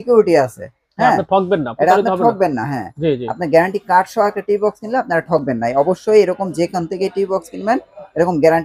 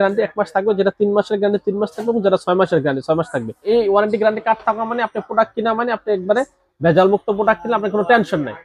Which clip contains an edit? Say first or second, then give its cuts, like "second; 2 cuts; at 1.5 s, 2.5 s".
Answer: second; 1 cut; at 3.7 s